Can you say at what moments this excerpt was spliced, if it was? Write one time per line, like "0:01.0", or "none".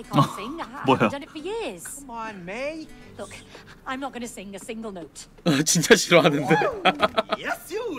0:03.1